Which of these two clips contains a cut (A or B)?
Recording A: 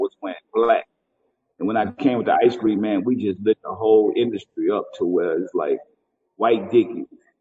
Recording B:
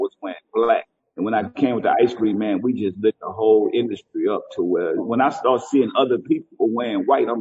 B